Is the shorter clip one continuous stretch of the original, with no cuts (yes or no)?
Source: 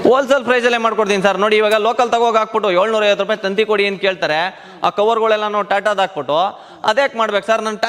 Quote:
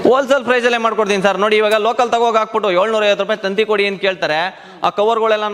yes